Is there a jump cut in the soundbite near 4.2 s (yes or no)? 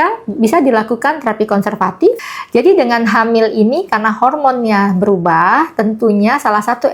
no